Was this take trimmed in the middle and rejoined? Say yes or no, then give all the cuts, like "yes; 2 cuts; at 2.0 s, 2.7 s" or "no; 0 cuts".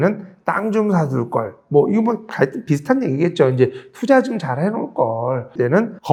no; 0 cuts